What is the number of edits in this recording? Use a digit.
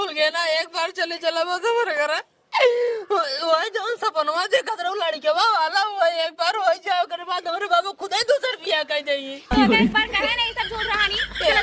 0